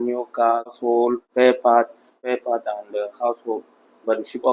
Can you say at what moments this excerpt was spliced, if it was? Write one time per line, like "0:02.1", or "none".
0:00.8
0:02.2

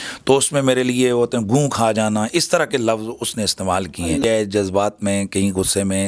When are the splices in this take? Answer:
0:04.2

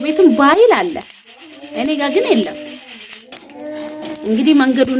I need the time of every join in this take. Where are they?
none

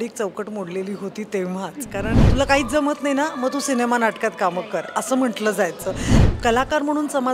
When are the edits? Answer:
0:02.2
0:06.1

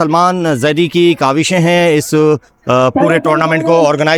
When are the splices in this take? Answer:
none

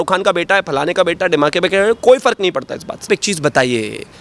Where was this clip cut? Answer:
0:03.1

